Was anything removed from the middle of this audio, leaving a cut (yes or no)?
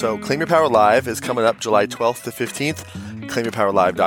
yes